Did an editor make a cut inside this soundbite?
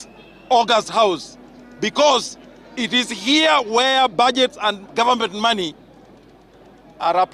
no; 0 cuts

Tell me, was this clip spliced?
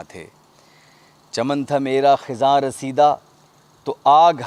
no; 0 cuts

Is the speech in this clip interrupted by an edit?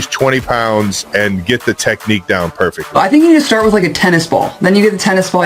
yes; 1 cut; at 2.9 s

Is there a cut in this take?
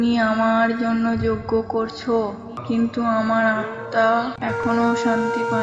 no; 0 cuts

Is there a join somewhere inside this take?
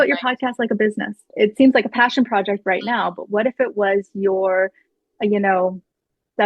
yes; 1 cut; at 1.3 s

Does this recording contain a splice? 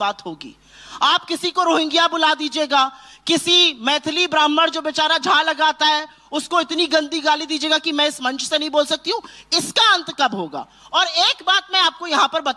no; 0 cuts

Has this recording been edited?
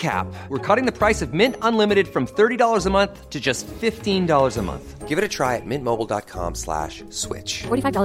no; 0 cuts

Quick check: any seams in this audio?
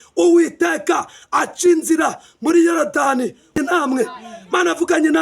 yes; 1 cut; at 3.6 s

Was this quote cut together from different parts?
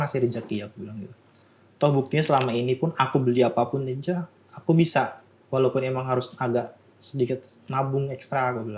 no; 0 cuts

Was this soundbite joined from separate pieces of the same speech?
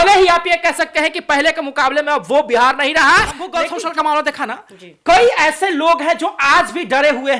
yes; 1 cut; at 3.6 s

